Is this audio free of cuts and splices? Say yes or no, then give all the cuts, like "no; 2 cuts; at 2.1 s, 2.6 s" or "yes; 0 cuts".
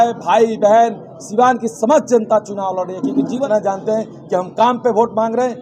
no; 1 cut; at 3.5 s